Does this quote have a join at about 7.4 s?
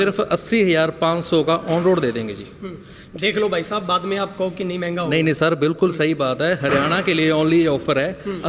no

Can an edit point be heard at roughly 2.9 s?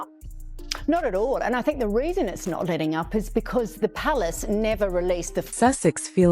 no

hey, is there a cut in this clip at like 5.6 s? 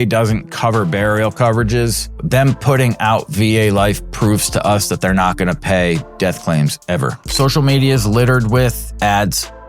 no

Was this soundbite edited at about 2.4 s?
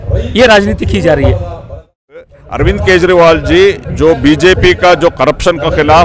yes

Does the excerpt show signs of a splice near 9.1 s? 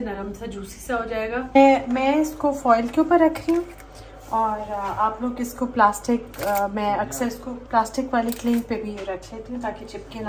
no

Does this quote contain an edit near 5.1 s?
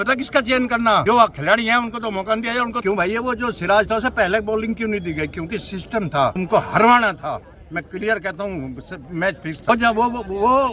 no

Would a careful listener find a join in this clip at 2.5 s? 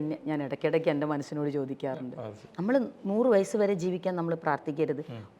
yes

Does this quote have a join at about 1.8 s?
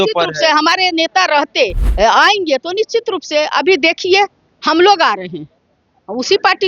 yes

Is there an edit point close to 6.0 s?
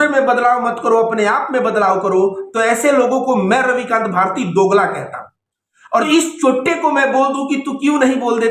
yes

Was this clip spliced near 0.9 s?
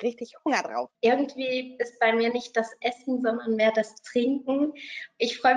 yes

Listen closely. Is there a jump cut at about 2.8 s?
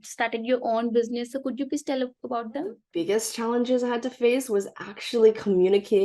yes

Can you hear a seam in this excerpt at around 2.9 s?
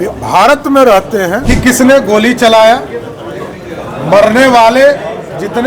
no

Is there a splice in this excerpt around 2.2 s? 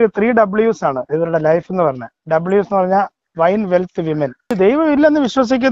no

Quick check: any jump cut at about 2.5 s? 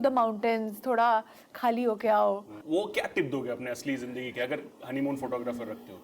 yes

